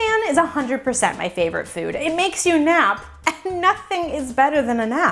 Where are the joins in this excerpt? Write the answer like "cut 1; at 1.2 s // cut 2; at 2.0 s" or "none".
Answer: none

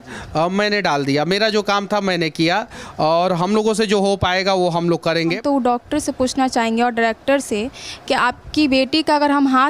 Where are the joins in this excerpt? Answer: cut 1; at 5.4 s

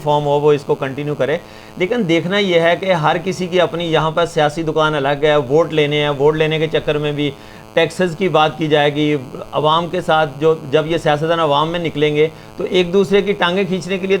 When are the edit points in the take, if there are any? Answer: none

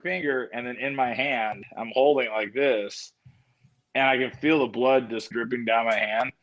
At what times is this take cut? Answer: cut 1; at 5.3 s

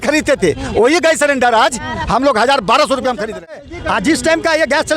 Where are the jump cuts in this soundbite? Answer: cut 1; at 3.6 s

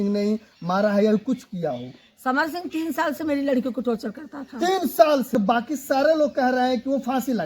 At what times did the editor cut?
cut 1; at 5.3 s

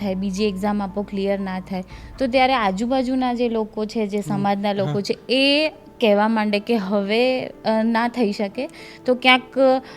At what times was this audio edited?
none

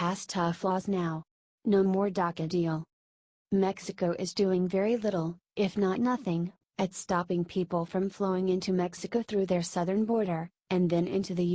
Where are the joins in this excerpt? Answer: cut 1; at 3.6 s

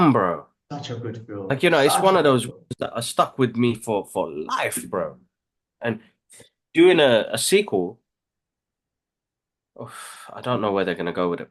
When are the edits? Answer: none

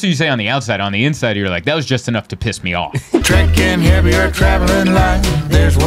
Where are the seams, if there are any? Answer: cut 1; at 3.2 s

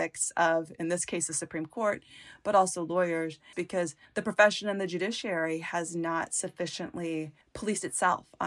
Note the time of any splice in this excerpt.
cut 1; at 3.6 s // cut 2; at 7.4 s

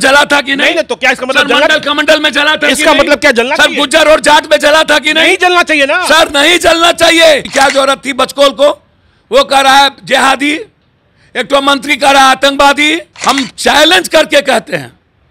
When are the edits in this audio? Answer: cut 1; at 7.5 s // cut 2; at 13.1 s

